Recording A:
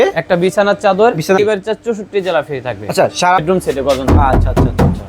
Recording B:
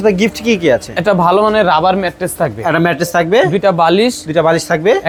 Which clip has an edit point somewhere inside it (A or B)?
A